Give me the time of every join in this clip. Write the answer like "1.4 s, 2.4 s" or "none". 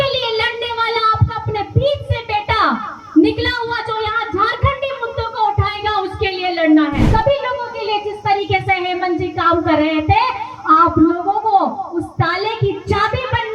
7.1 s